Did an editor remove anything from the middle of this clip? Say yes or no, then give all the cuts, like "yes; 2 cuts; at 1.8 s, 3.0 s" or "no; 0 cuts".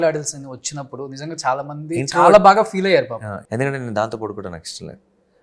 yes; 1 cut; at 3.4 s